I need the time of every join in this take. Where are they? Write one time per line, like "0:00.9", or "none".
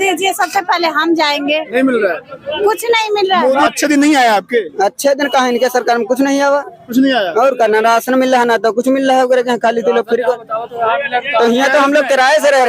0:03.7